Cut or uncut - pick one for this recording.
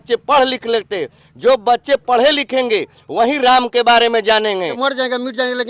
cut